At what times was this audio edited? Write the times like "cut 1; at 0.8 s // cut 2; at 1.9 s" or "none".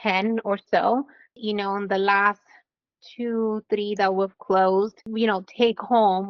cut 1; at 1.3 s // cut 2; at 5.0 s